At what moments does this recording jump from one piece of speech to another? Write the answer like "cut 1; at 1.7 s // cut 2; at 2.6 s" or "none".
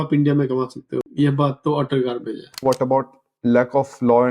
cut 1; at 1.1 s // cut 2; at 2.6 s

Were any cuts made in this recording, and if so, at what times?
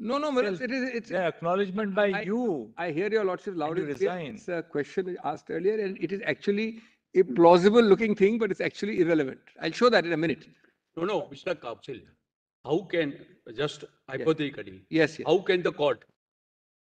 none

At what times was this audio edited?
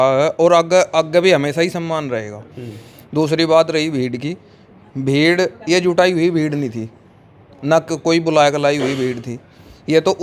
none

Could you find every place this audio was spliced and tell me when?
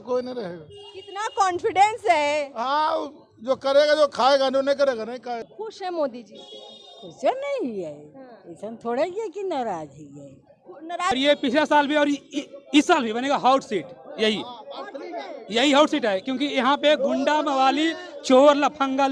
cut 1; at 5.4 s // cut 2; at 11.1 s

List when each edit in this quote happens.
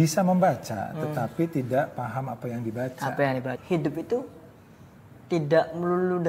cut 1; at 3.6 s

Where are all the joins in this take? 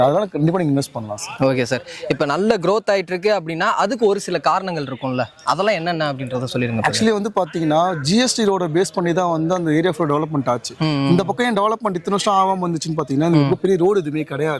none

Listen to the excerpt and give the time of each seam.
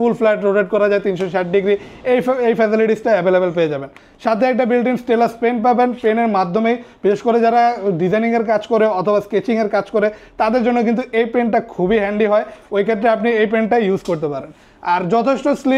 none

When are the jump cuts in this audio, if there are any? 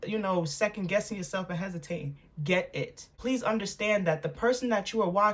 cut 1; at 3.2 s

